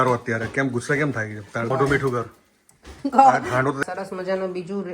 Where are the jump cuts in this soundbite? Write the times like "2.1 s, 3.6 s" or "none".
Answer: 1.7 s, 3.8 s